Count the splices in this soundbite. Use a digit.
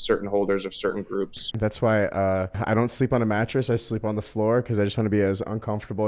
2